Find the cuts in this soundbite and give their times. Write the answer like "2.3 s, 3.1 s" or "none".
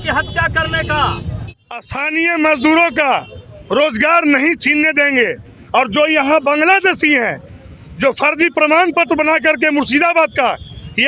1.3 s